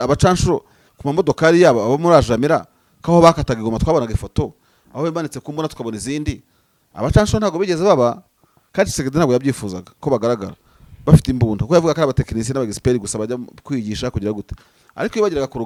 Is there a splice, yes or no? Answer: no